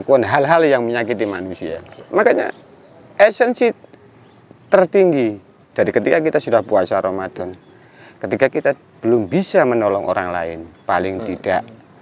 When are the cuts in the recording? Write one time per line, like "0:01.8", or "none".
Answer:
none